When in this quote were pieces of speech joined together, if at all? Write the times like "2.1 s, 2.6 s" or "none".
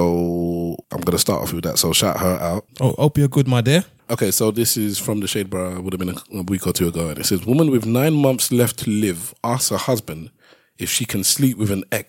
0.9 s, 2.7 s, 4.0 s